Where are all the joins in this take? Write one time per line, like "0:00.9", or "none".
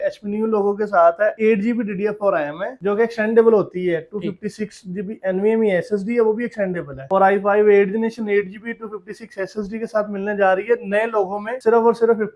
none

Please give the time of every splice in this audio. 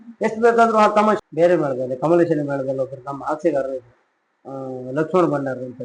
0:01.2

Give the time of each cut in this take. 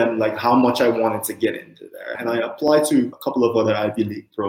0:02.1
0:03.1

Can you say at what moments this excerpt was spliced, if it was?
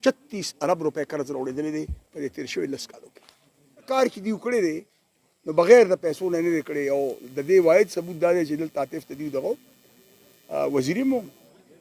0:03.9

